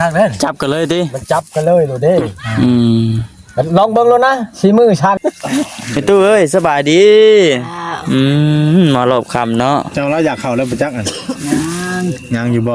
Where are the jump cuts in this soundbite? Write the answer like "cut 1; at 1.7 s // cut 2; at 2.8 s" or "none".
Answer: cut 1; at 5.2 s